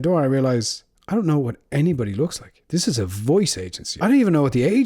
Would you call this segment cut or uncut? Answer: cut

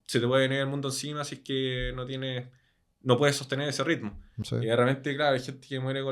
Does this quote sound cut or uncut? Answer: cut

